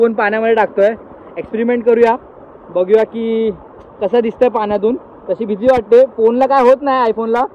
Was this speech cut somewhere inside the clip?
no; 0 cuts

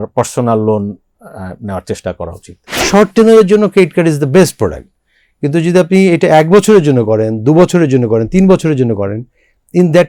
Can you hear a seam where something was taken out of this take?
yes; 1 cut; at 2.8 s

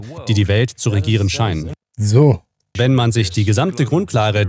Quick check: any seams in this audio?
yes; 2 cuts; at 1.8 s, 2.7 s

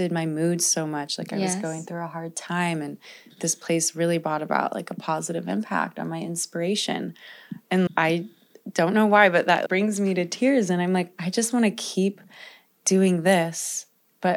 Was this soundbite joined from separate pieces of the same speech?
yes; 2 cuts; at 7.9 s, 9.6 s

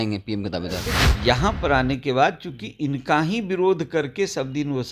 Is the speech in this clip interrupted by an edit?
yes; 1 cut; at 0.9 s

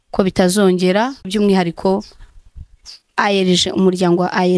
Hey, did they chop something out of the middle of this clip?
yes; 1 cut; at 1.3 s

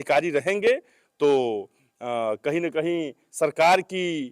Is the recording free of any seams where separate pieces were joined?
yes; 0 cuts

